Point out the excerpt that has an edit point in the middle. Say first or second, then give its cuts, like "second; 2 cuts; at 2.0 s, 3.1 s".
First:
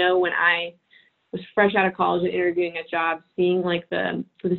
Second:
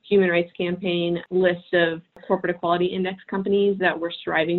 second; 2 cuts; at 1.2 s, 2.1 s